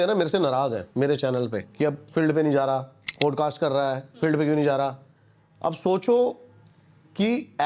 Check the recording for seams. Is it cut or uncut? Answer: cut